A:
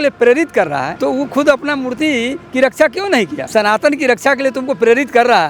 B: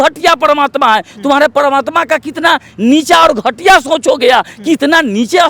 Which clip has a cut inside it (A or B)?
A